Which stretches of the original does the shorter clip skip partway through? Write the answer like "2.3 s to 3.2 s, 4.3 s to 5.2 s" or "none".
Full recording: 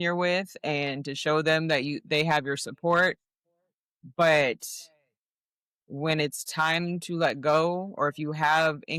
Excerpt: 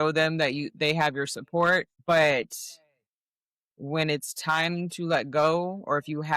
3.2 s to 4.0 s